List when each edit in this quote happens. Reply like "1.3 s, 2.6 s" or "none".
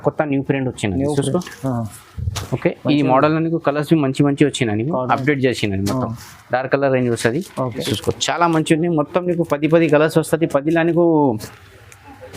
7.8 s